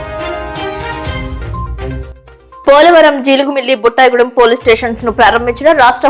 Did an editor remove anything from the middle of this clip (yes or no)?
no